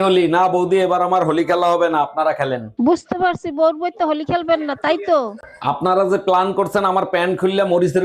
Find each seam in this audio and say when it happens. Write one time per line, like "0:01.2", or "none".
none